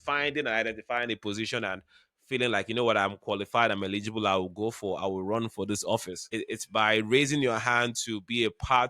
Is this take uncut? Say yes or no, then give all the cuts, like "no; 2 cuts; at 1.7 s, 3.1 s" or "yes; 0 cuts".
no; 1 cut; at 6.2 s